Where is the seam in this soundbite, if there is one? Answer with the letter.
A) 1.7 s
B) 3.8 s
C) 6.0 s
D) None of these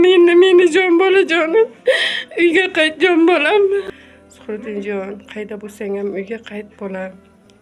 B